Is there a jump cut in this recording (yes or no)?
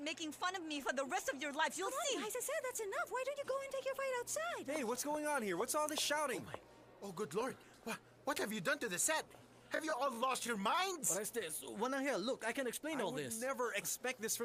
no